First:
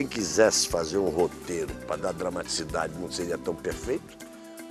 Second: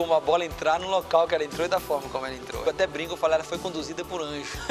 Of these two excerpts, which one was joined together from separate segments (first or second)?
second